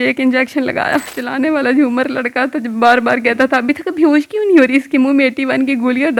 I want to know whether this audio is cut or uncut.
uncut